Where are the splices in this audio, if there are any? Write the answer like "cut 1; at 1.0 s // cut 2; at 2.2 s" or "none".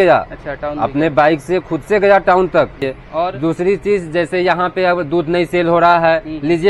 cut 1; at 2.9 s